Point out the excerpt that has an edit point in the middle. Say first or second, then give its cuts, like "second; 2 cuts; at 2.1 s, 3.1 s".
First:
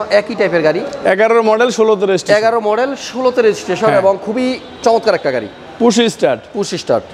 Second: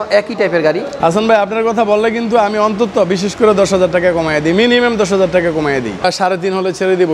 second; 2 cuts; at 0.9 s, 6.0 s